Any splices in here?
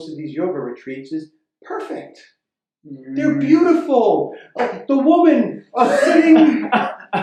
no; 0 cuts

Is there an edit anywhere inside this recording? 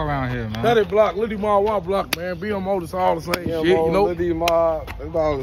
no; 0 cuts

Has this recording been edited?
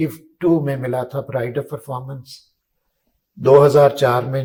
no; 0 cuts

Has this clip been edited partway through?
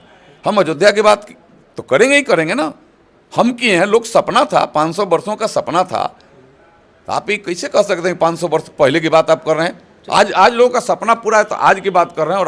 no; 0 cuts

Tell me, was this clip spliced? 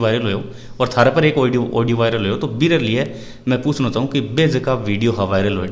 no; 0 cuts

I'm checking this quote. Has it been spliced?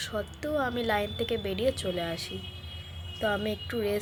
no; 0 cuts

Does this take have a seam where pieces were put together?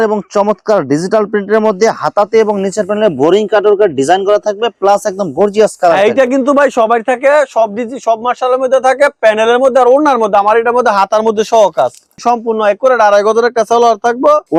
no; 0 cuts

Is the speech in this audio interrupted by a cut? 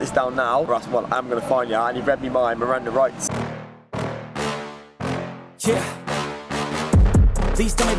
yes; 1 cut; at 3.2 s

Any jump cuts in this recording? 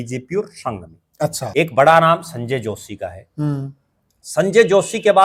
yes; 1 cut; at 1.5 s

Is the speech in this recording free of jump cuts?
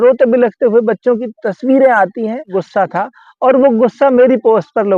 no; 1 cut; at 2.6 s

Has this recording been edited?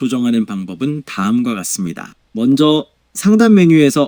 no; 0 cuts

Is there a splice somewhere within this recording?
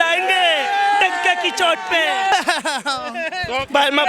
yes; 1 cut; at 2.3 s

